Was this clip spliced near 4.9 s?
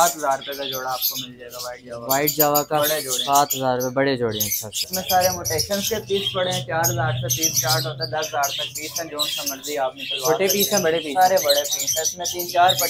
yes; 1 cut; at 4.9 s

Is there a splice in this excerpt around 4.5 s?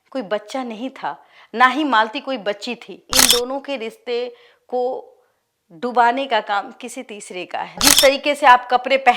no; 2 cuts; at 3.1 s, 7.9 s

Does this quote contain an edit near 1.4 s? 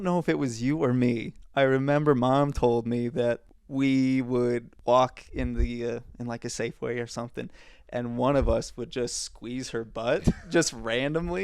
yes; 3 cuts; at 1.4 s, 3.5 s, 4.7 s

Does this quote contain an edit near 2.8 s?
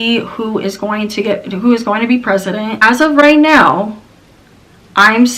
yes; 1 cut; at 2.8 s

